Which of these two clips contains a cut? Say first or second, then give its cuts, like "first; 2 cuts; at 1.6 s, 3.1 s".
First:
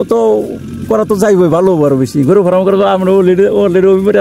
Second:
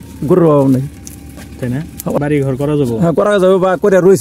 second; 1 cut; at 2.2 s